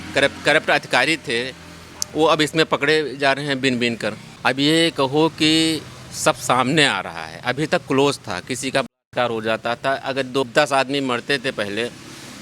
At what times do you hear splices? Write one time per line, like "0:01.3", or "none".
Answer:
0:04.3
0:10.4